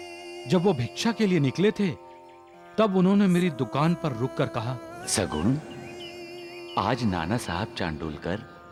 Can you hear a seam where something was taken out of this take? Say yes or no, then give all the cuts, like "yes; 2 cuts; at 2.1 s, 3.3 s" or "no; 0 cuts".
no; 0 cuts